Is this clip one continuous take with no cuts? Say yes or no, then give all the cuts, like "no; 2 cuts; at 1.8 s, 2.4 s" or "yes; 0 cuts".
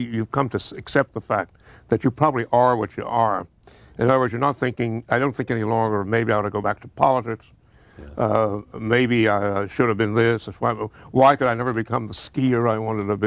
yes; 0 cuts